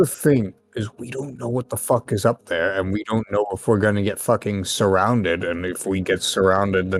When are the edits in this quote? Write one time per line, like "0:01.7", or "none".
none